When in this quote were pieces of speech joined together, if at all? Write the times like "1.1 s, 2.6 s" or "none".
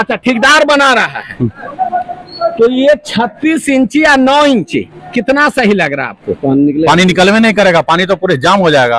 none